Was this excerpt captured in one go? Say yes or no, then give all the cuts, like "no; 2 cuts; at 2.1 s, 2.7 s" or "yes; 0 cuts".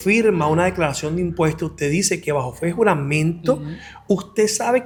yes; 0 cuts